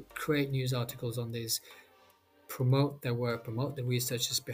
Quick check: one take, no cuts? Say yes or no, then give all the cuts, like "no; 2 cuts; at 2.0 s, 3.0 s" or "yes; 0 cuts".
yes; 0 cuts